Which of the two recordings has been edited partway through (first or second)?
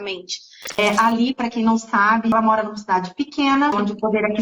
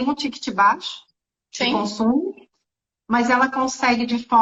first